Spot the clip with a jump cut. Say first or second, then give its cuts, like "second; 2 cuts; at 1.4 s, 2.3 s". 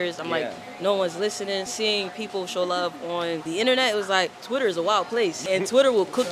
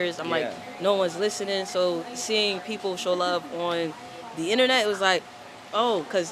first; 4 cuts; at 1.7 s, 3.4 s, 4.4 s, 5.4 s